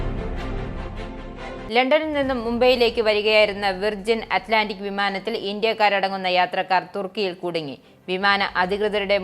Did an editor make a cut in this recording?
yes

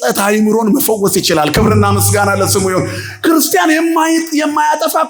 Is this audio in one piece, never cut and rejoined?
yes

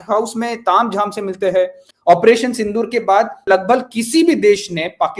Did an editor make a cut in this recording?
yes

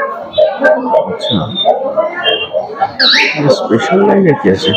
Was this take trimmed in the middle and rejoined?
no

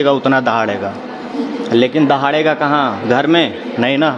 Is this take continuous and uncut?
yes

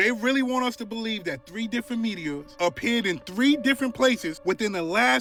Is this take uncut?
yes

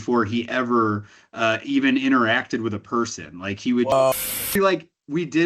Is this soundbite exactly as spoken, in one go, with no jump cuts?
no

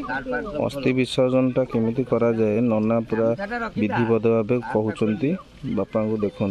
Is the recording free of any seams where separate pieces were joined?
yes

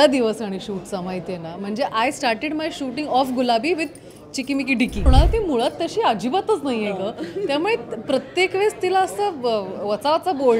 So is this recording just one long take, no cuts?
no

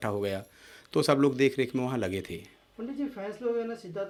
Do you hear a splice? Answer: no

